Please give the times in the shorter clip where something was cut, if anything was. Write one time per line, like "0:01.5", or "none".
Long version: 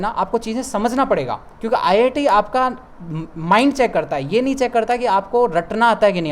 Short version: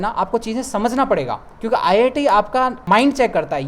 0:02.8